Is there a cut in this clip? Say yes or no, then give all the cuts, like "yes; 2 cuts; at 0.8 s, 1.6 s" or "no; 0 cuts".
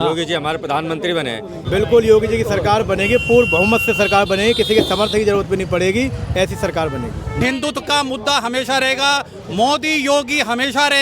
yes; 2 cuts; at 1.5 s, 7.4 s